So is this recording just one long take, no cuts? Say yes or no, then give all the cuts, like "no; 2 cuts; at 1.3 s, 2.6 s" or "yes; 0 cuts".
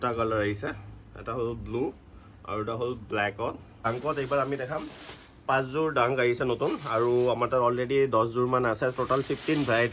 yes; 0 cuts